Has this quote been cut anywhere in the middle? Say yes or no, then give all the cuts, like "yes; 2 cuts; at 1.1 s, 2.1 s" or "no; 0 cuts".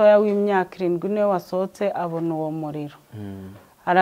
no; 0 cuts